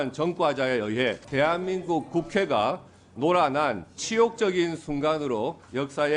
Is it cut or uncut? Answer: cut